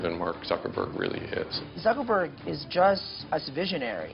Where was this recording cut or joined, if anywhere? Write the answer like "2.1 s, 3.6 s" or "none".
1.6 s, 3.1 s